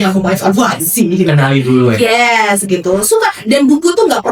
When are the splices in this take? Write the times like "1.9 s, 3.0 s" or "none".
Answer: none